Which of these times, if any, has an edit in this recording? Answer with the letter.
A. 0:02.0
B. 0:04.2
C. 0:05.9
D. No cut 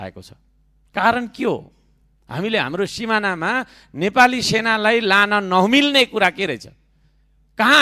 D